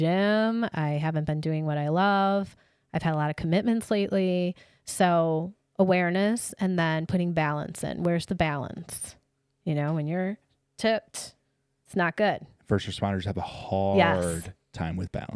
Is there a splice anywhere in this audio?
no; 0 cuts

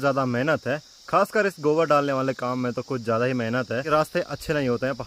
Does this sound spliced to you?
yes; 1 cut; at 3.8 s

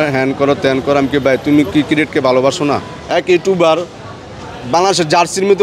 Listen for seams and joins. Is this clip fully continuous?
no; 1 cut; at 2.9 s

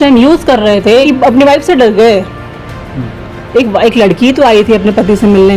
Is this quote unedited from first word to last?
no; 1 cut; at 1.1 s

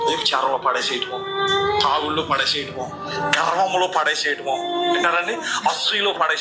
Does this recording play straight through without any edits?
yes; 0 cuts

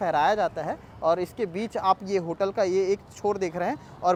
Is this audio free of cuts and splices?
yes; 0 cuts

